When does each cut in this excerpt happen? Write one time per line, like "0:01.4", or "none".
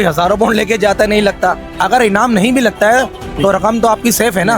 0:01.7